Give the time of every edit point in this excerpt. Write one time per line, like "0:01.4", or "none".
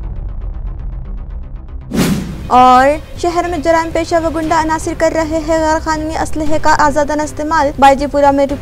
0:02.0